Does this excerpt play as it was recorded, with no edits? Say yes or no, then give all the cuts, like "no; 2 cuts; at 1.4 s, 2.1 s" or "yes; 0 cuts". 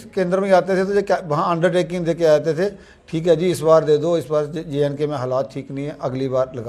yes; 0 cuts